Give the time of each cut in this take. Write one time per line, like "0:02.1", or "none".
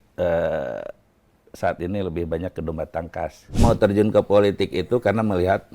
0:03.6